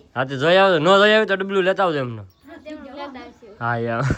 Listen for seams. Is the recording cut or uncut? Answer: uncut